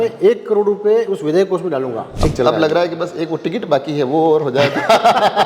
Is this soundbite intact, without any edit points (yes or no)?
no